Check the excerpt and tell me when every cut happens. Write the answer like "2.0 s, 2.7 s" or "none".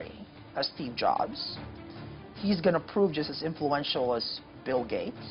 none